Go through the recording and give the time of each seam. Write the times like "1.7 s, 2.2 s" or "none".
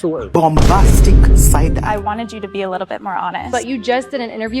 1.8 s, 3.5 s